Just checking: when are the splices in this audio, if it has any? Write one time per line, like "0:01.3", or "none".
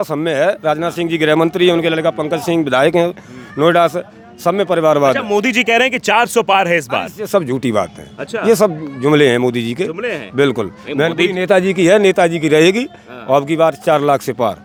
none